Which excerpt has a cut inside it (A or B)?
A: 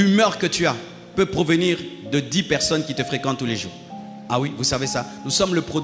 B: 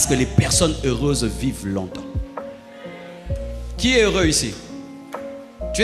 B